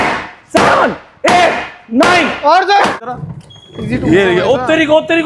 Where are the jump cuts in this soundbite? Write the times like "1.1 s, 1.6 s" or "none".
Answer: 3.0 s